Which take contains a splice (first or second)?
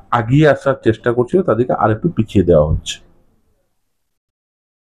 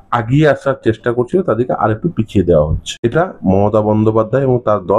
second